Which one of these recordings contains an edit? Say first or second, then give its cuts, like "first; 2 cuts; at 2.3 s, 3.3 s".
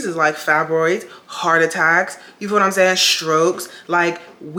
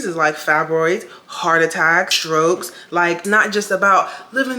second; 2 cuts; at 2.2 s, 3.2 s